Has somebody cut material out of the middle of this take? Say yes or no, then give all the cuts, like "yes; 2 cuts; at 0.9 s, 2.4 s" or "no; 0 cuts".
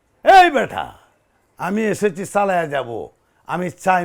no; 0 cuts